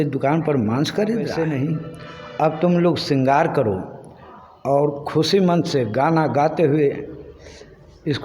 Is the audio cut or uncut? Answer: cut